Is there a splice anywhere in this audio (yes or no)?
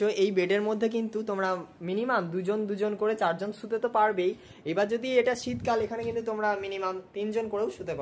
no